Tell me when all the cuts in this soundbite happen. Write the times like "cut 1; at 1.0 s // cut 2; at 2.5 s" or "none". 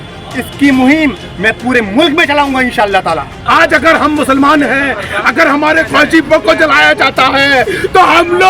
cut 1; at 3.4 s